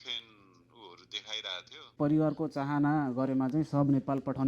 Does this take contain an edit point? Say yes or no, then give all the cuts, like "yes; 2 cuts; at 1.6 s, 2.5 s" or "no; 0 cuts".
yes; 1 cut; at 1.9 s